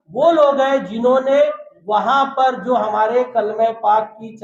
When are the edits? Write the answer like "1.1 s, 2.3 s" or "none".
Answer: none